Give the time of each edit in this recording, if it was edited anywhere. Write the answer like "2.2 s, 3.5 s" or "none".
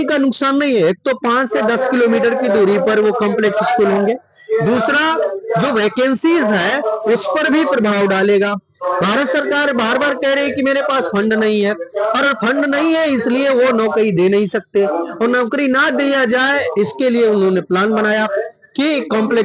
none